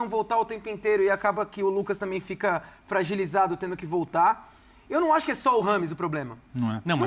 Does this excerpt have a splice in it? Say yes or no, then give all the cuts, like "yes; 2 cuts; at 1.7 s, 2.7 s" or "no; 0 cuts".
no; 0 cuts